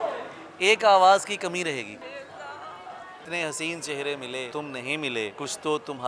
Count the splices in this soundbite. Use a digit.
4